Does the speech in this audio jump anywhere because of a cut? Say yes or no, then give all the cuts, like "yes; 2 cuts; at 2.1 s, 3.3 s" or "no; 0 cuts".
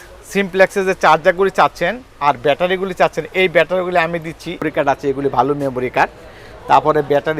yes; 1 cut; at 4.6 s